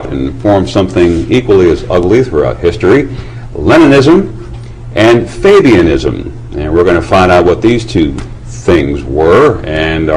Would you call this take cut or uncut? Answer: uncut